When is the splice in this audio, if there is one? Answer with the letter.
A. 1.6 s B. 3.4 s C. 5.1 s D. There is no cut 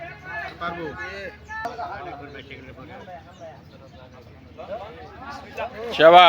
A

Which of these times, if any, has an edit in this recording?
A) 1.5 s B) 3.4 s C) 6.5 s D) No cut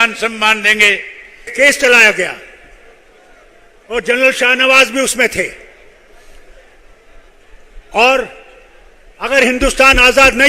A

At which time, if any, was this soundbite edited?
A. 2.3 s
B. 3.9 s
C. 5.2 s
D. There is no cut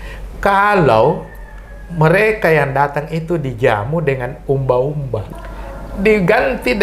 C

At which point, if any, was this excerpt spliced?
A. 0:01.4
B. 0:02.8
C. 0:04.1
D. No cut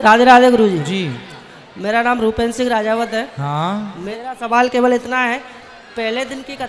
C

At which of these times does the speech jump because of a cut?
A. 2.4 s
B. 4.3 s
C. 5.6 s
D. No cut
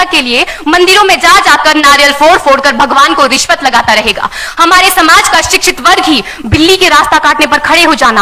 D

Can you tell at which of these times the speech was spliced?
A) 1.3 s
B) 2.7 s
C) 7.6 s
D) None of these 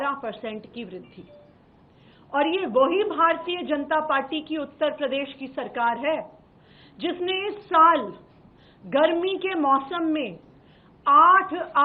D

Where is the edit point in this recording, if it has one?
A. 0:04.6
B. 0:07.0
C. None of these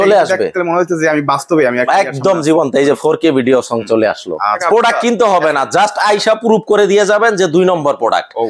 A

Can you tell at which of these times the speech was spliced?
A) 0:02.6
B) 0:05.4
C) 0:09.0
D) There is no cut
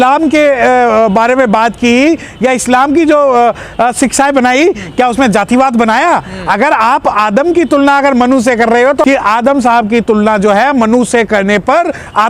C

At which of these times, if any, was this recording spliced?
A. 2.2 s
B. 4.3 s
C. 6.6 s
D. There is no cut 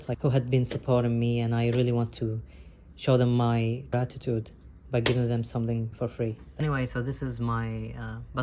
C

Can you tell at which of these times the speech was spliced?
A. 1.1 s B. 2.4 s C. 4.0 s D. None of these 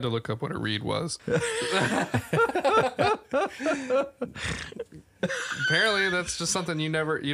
A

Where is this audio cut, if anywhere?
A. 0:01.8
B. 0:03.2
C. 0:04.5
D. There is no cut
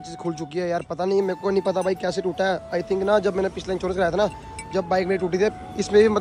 D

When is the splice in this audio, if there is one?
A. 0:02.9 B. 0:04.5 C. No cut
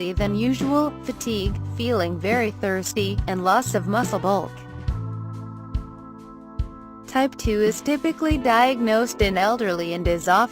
A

